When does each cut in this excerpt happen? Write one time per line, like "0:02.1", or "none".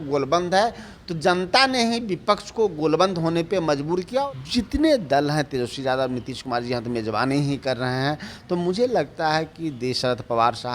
0:04.2